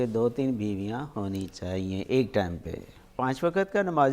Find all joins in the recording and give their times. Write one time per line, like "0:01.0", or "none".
0:03.1

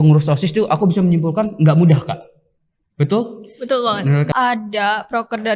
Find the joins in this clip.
0:04.3

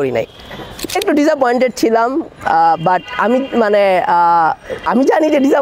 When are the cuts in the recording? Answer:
0:01.0

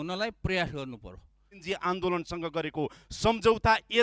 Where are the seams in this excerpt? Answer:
0:01.6

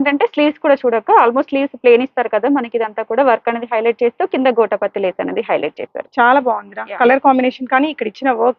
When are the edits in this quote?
none

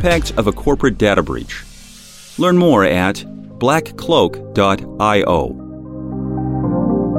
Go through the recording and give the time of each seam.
0:06.0

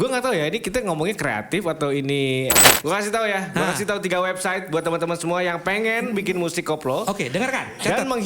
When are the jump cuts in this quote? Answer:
0:02.7

